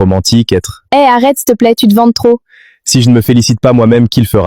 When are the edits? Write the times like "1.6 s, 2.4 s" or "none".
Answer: none